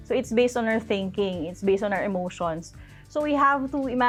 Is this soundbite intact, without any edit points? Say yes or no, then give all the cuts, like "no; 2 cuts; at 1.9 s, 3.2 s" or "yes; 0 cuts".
yes; 0 cuts